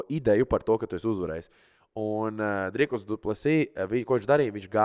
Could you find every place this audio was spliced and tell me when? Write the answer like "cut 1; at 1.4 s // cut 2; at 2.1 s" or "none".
none

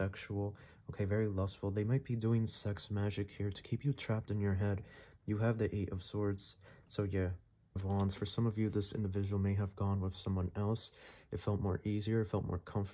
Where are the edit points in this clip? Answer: cut 1; at 7.8 s

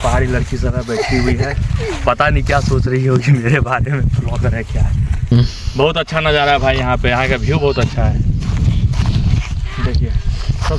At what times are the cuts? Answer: cut 1; at 5.3 s

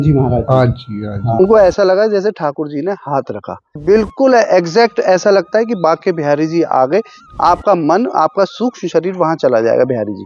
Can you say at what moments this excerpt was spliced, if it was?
cut 1; at 1.4 s // cut 2; at 3.8 s // cut 3; at 7.2 s

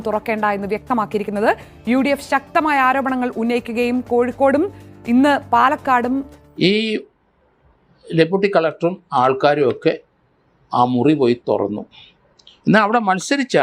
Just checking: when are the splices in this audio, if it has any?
cut 1; at 6.4 s

